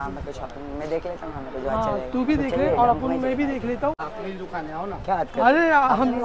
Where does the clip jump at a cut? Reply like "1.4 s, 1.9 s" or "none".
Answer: 4.0 s